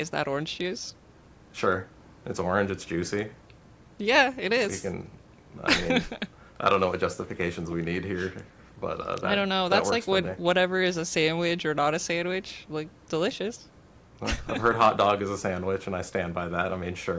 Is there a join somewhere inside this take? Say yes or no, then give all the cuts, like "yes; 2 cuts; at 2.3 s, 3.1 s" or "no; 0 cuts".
no; 0 cuts